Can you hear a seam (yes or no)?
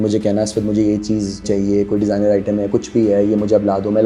yes